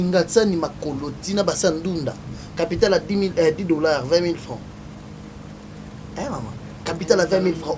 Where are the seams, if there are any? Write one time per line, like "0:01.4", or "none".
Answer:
none